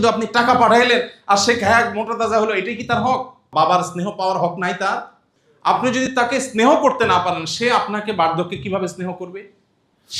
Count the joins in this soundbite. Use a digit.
1